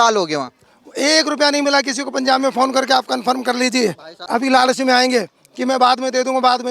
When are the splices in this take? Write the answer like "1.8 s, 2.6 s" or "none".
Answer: 4.1 s